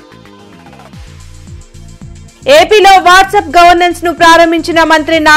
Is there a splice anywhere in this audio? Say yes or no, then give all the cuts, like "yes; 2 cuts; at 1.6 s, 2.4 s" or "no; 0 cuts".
yes; 1 cut; at 2.3 s